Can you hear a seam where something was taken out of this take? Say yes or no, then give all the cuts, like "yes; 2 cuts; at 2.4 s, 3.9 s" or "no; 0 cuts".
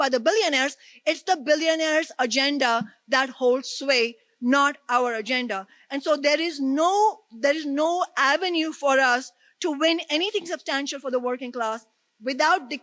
no; 0 cuts